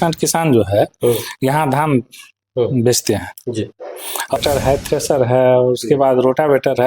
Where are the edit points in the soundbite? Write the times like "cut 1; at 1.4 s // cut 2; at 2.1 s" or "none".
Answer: cut 1; at 4.4 s